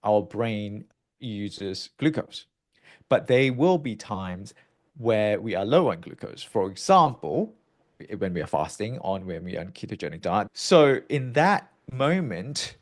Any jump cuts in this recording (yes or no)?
yes